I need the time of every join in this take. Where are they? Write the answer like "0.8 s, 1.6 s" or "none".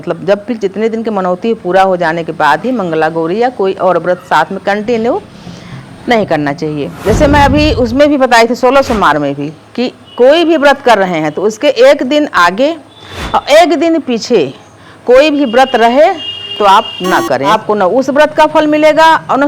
6.9 s, 17.5 s